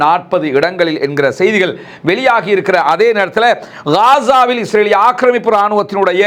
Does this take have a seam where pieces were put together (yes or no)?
no